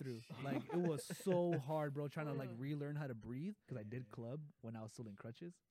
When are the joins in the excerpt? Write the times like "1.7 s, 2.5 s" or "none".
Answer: 3.7 s